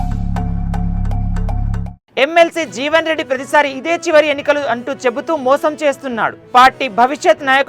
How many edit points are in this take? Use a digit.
1